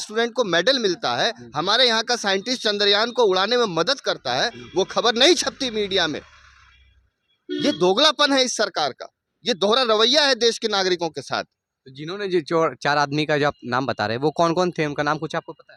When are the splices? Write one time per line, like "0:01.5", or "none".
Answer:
none